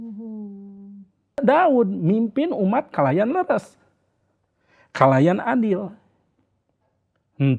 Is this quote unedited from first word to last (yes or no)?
no